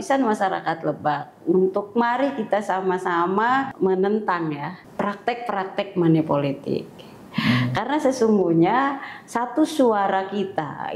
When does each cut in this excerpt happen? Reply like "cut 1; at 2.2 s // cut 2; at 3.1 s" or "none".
cut 1; at 3.7 s // cut 2; at 4.8 s